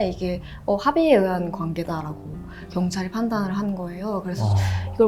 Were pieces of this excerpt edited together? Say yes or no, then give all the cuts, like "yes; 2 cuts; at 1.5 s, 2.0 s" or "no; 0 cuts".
no; 0 cuts